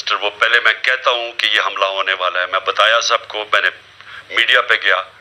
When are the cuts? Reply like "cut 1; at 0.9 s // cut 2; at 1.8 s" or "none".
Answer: none